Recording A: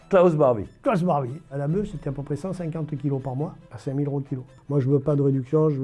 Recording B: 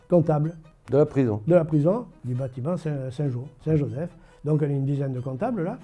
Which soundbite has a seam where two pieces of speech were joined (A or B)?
A